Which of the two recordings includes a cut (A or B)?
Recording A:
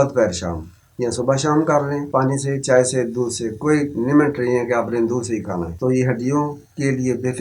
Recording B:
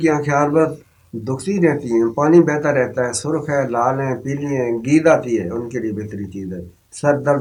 A